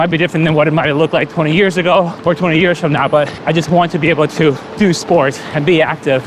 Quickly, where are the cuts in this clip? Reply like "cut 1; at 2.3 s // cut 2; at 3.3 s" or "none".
cut 1; at 2.1 s // cut 2; at 3.4 s // cut 3; at 4.7 s